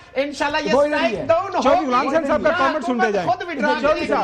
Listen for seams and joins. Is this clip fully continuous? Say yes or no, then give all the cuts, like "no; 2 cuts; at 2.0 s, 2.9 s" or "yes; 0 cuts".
yes; 0 cuts